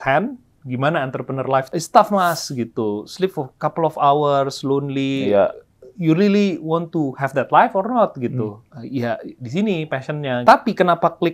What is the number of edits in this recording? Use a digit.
3